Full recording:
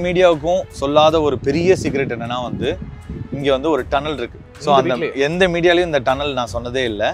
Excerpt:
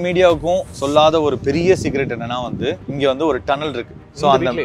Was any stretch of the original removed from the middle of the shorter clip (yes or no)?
yes